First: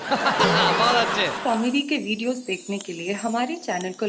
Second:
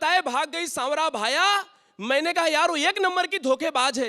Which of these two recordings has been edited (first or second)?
first